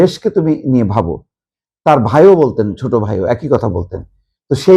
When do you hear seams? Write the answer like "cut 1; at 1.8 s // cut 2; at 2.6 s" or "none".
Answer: none